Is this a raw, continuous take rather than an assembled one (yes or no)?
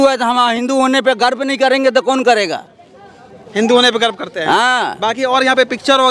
yes